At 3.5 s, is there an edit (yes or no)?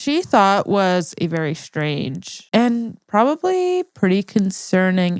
no